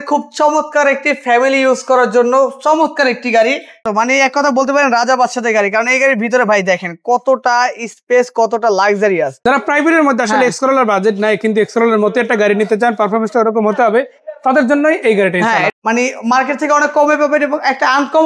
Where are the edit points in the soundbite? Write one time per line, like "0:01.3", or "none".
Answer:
0:03.9
0:09.3
0:15.7